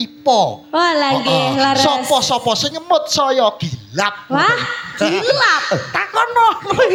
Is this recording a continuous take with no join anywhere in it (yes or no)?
yes